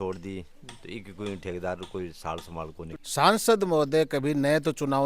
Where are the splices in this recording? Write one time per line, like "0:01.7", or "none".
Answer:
0:02.9